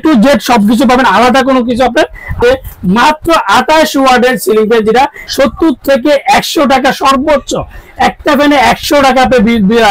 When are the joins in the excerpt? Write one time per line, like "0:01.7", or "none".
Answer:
0:02.4
0:05.2